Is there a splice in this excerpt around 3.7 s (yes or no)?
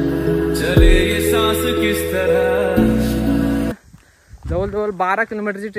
yes